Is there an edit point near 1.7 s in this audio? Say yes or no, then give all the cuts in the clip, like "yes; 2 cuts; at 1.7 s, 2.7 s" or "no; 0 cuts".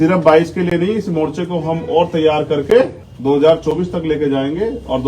no; 1 cut; at 3.1 s